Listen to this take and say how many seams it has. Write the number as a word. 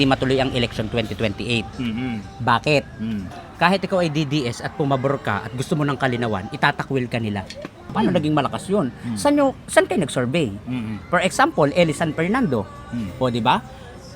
two